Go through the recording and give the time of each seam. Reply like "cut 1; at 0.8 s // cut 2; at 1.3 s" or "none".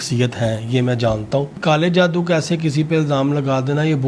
cut 1; at 1.6 s